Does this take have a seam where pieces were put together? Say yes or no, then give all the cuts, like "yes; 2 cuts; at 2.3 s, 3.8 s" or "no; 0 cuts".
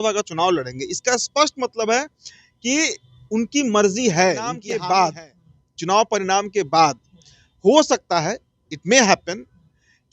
yes; 1 cut; at 4.6 s